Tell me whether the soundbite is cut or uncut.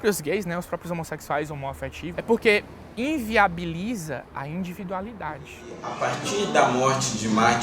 cut